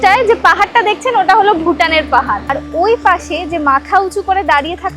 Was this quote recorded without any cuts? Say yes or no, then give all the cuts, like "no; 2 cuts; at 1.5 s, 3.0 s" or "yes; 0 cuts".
no; 1 cut; at 2.6 s